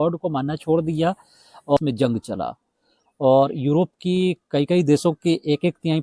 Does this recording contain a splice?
yes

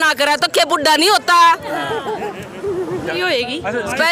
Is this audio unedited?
no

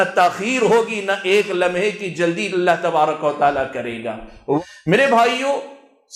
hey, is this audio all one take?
no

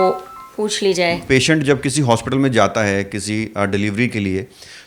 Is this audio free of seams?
no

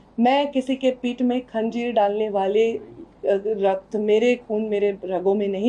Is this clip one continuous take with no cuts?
yes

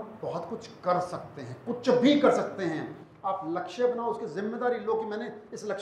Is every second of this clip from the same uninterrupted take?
yes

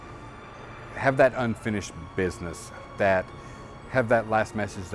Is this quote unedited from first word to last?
no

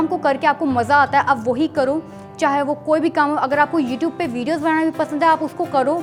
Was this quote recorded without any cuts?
yes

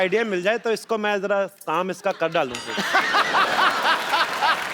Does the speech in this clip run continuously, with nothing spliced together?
yes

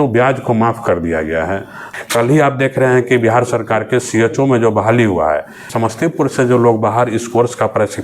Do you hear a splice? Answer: yes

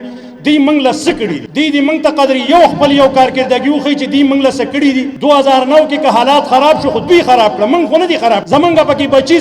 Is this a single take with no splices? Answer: no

